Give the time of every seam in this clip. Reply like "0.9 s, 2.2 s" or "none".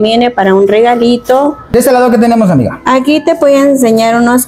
1.7 s

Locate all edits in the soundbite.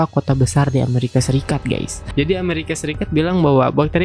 2.0 s

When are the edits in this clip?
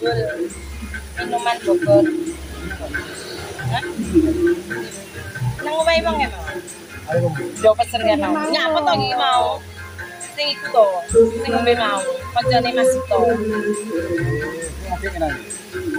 none

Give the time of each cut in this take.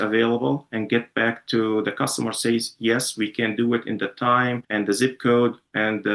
4.6 s

